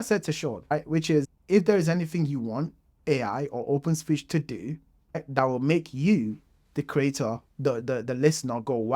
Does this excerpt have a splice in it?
no; 0 cuts

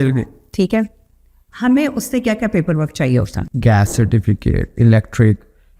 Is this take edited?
yes; 1 cut; at 3.4 s

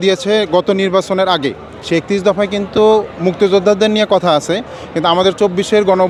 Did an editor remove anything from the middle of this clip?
no; 0 cuts

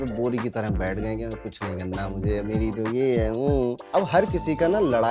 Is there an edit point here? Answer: yes; 1 cut; at 3.8 s

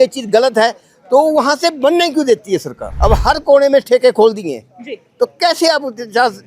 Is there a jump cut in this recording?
yes; 1 cut; at 2.8 s

